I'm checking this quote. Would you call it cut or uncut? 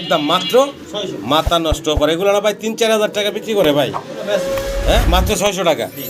uncut